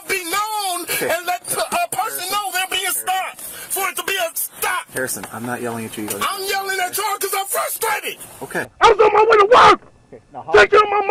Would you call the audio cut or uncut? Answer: uncut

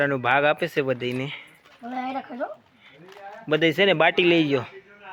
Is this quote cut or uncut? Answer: uncut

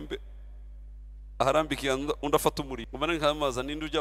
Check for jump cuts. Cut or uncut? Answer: cut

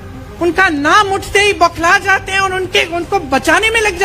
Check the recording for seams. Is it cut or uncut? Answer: uncut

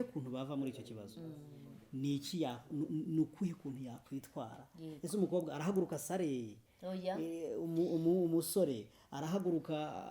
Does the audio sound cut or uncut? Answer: uncut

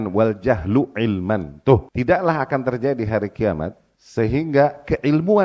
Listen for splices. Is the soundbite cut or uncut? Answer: cut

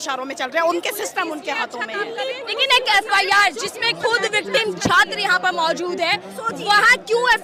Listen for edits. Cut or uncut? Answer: uncut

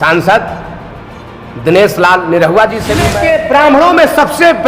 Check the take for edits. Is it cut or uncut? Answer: cut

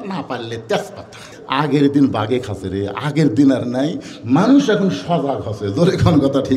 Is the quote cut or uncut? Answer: cut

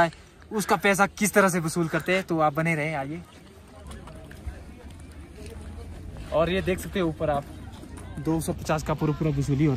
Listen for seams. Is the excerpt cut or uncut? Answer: uncut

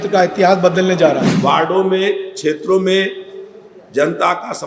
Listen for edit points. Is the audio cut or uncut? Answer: cut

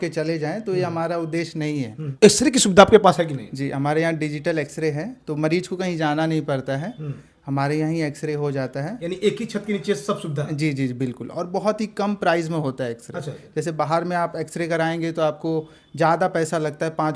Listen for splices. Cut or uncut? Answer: cut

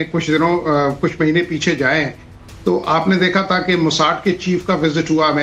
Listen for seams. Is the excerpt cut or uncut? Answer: cut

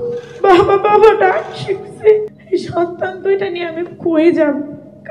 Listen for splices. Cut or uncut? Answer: cut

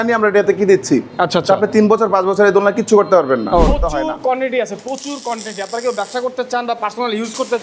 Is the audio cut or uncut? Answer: cut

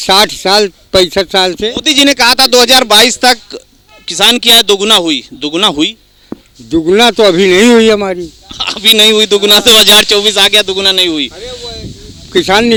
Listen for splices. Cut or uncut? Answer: uncut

